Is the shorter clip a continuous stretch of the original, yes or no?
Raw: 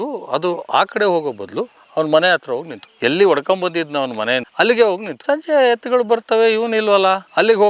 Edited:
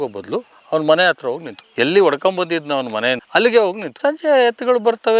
yes